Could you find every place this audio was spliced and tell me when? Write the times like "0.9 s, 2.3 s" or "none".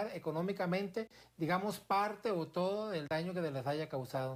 none